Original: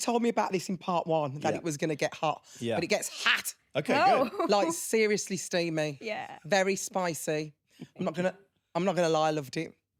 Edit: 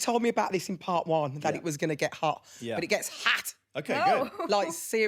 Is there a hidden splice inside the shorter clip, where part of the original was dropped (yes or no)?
no